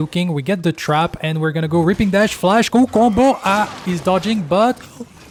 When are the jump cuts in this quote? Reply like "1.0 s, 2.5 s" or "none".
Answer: none